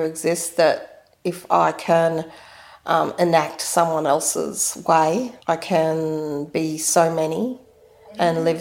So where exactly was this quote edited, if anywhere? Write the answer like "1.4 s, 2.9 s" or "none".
5.3 s